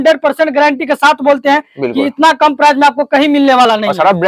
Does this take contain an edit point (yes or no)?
no